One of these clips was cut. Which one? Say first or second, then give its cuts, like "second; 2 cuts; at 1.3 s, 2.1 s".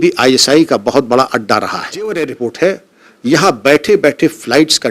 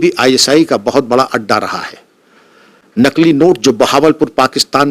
first; 1 cut; at 1.9 s